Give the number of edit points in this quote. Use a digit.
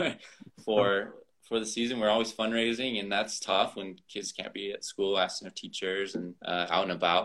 1